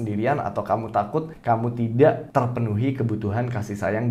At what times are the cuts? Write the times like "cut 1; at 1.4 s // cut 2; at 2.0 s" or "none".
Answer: cut 1; at 1.3 s // cut 2; at 2.2 s